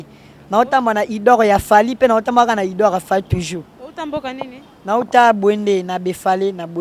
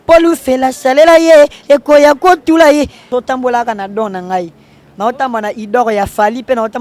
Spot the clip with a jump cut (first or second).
second